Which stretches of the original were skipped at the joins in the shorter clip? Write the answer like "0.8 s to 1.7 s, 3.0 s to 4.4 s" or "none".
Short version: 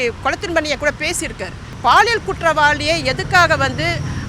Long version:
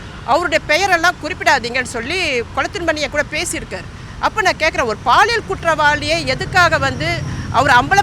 4.1 s to 5.0 s